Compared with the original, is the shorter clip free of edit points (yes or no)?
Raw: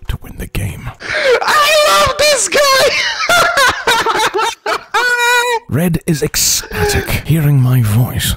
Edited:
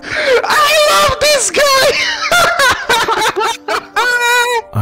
yes